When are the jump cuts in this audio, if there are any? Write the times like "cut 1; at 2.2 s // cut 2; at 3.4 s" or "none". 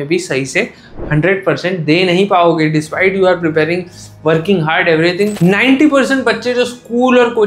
cut 1; at 5.3 s